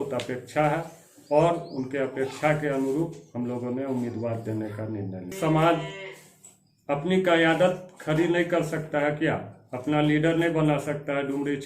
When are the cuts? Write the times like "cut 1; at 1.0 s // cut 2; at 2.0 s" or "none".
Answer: cut 1; at 5.3 s